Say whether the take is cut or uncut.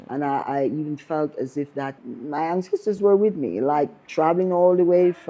cut